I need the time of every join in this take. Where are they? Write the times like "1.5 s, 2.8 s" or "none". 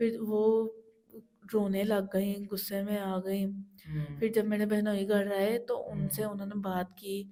none